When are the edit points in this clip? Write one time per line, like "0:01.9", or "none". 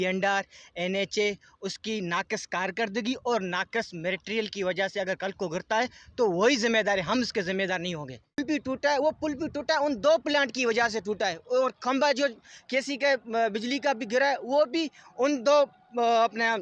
0:08.4

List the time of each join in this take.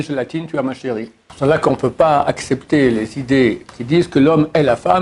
0:01.2
0:03.6

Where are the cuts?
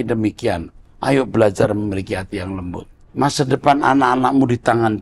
0:02.9

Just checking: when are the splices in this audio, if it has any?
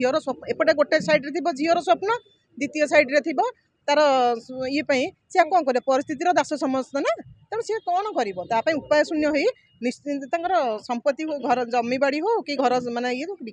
none

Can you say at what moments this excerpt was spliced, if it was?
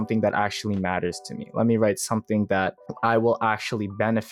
0:02.8

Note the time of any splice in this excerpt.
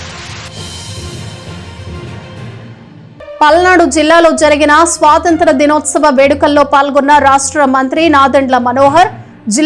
0:02.6

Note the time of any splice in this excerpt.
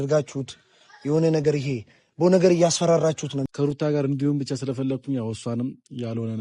0:03.5

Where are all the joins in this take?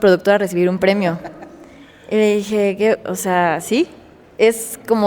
none

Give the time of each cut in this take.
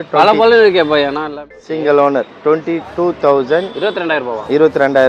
0:01.3

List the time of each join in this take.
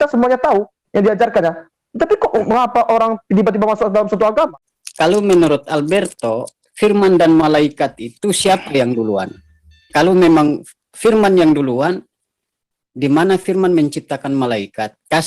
0:04.5

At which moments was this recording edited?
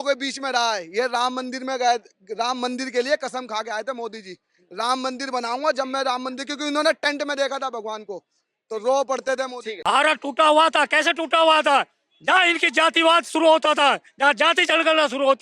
0:09.7

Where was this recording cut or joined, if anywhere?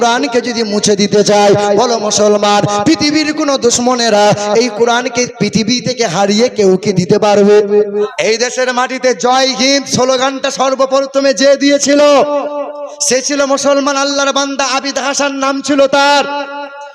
0:07.9

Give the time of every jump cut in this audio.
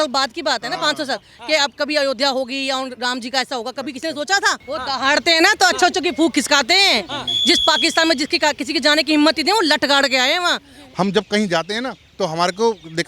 0:04.6
0:10.8

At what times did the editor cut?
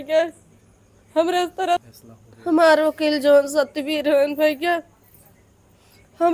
0:01.9

